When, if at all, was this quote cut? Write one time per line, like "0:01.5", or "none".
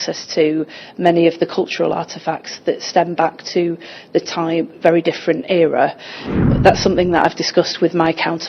0:06.3

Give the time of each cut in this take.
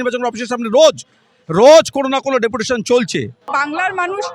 0:03.5

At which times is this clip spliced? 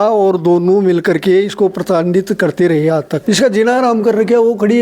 none

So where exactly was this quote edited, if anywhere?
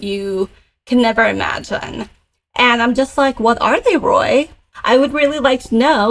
0:04.7

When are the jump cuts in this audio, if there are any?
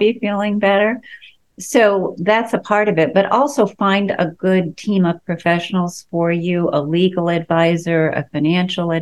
none

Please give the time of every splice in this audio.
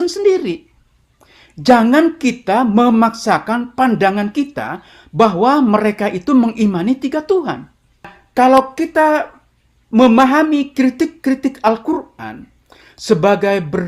0:08.2

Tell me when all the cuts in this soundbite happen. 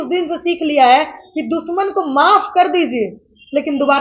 none

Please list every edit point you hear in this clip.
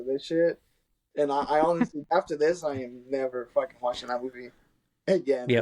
0:02.1

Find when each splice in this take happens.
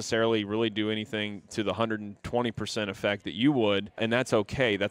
0:04.0

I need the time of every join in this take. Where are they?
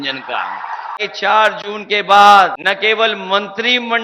0:01.0
0:02.6

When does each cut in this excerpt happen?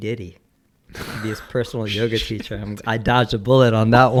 none

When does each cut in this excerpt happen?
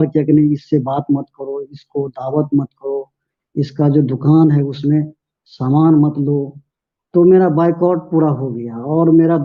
none

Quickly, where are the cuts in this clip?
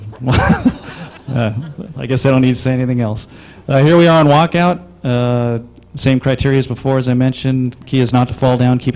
0:08.0

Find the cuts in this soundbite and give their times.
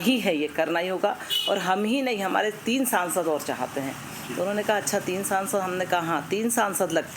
none

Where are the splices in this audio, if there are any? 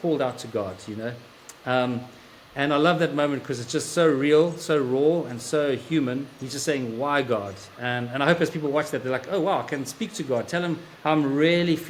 none

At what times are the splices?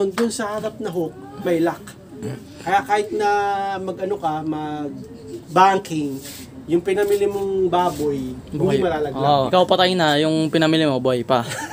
0:09.5

